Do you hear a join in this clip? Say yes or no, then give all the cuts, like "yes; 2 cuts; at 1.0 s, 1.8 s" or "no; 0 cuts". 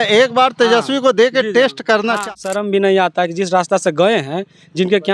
yes; 1 cut; at 2.2 s